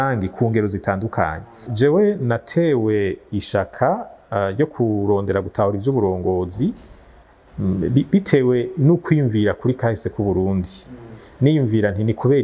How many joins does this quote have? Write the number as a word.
one